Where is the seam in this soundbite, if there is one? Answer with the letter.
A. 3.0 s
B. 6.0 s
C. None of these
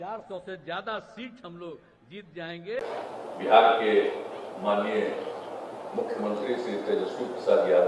A